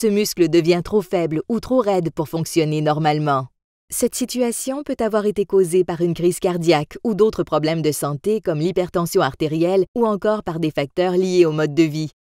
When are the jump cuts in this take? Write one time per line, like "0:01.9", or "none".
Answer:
0:06.2